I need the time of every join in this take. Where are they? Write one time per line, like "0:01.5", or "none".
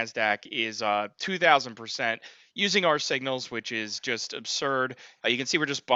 none